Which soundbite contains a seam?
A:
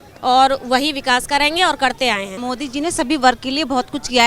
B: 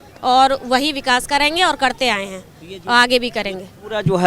A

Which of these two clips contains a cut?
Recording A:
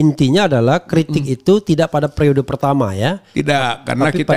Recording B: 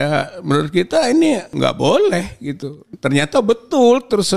B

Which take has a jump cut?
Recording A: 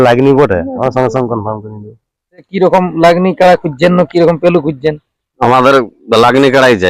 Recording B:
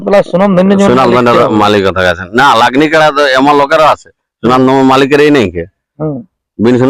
A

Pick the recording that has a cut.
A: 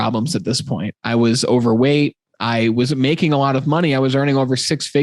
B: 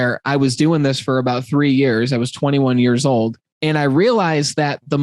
B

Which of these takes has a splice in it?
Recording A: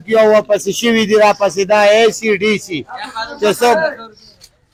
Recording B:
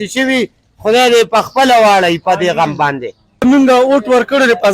B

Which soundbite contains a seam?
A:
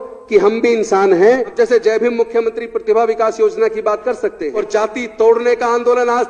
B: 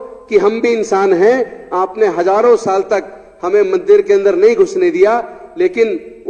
A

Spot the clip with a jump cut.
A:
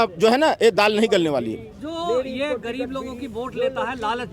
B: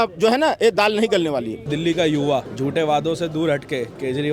B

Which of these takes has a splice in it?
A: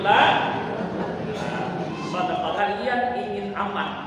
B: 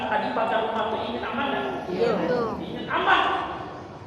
A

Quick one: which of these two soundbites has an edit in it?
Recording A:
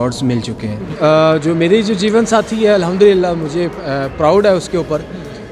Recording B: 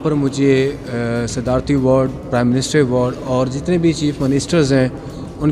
A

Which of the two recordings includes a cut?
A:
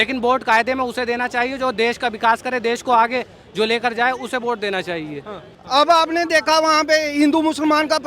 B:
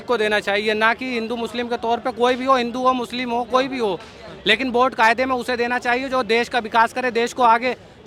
A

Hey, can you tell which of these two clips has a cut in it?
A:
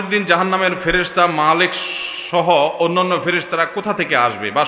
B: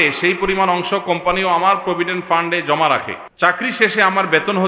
B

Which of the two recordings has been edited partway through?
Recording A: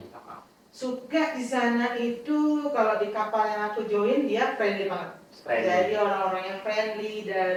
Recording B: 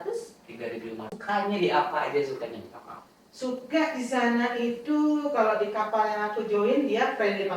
B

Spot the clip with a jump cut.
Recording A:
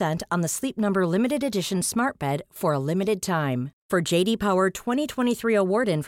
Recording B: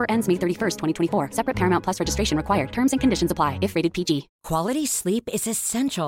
B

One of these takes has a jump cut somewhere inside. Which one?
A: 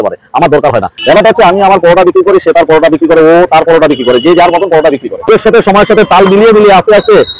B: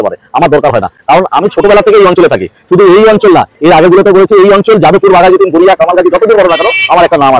A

